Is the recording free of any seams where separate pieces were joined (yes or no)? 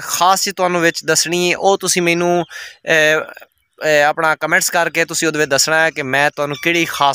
yes